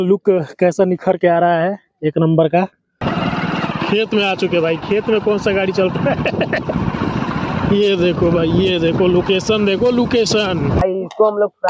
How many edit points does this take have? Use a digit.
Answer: 2